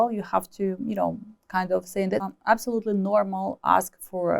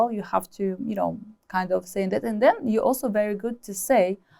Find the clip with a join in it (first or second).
first